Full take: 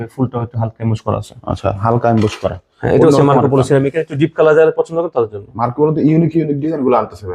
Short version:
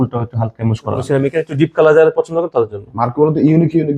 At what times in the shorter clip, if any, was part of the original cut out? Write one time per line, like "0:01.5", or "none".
0:01.1